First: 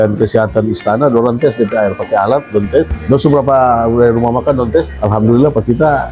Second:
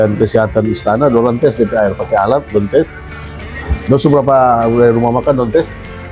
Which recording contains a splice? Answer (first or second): first